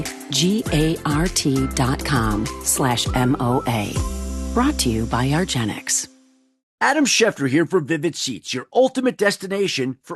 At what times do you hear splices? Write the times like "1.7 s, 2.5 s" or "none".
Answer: 6.6 s